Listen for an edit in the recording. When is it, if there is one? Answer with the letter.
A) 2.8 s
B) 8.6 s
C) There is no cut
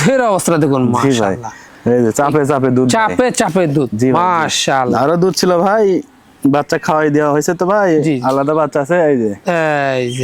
C